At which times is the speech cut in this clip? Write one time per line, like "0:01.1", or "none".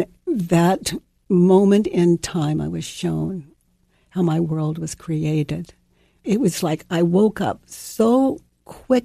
0:03.6
0:06.2